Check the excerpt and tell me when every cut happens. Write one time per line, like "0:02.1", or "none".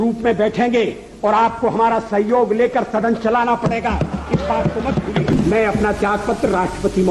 0:05.3